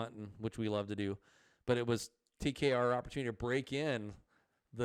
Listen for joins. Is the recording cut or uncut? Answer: uncut